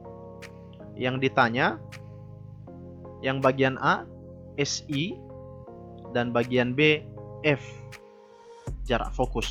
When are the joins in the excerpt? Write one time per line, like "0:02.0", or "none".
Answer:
0:01.0